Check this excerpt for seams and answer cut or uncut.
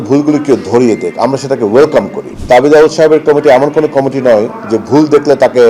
cut